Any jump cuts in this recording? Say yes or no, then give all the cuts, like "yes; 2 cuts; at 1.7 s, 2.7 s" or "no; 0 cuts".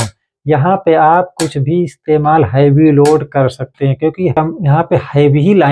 yes; 1 cut; at 4.3 s